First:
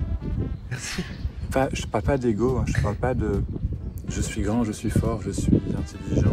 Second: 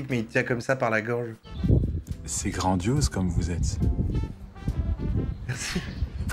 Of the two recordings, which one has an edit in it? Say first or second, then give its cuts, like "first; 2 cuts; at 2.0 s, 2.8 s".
second; 1 cut; at 1.4 s